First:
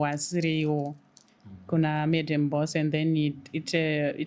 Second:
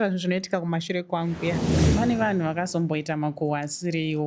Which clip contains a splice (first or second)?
second